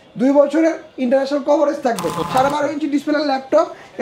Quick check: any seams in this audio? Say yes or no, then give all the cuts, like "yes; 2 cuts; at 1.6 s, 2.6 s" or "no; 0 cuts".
yes; 1 cut; at 2.1 s